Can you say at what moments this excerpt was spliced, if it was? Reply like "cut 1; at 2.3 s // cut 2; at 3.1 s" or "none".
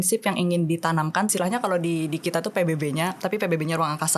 cut 1; at 1.3 s